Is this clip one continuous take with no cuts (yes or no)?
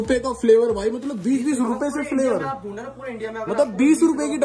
yes